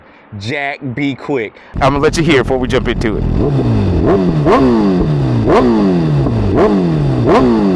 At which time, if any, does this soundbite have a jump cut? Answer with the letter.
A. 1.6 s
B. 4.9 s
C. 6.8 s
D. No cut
A